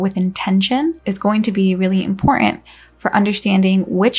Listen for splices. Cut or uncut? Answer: cut